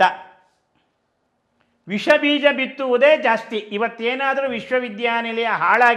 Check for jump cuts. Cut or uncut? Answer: uncut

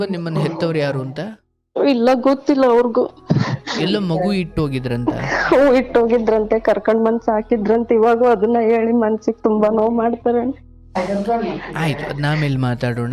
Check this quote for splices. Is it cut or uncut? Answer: uncut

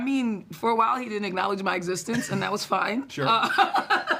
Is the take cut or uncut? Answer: uncut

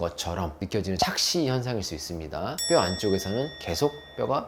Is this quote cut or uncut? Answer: uncut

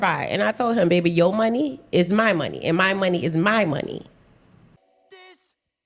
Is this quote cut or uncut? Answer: cut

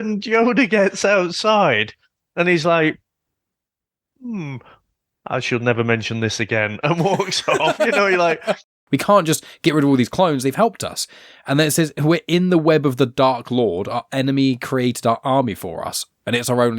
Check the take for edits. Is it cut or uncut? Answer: cut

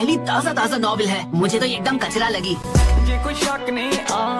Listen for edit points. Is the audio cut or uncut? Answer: uncut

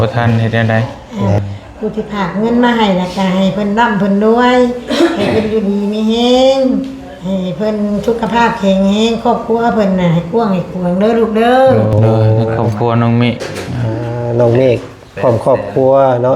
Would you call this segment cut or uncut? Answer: cut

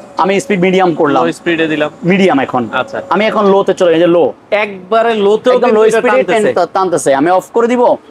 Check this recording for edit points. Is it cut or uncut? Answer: uncut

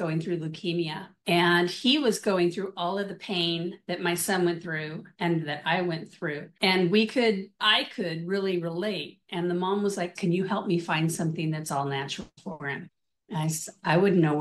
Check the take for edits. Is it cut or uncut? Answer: cut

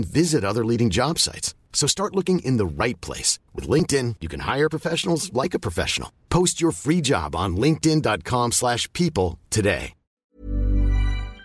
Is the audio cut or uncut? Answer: cut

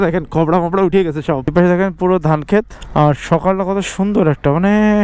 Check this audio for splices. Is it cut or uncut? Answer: cut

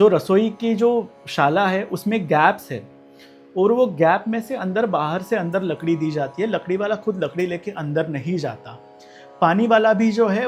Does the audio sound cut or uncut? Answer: uncut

